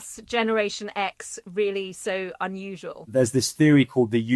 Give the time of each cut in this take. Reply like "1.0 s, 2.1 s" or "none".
3.0 s